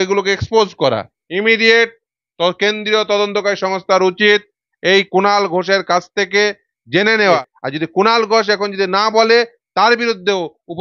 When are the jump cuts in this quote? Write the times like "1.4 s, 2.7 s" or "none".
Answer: 1.2 s, 7.5 s